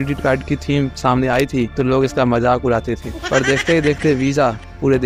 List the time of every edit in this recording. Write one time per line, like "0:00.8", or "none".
none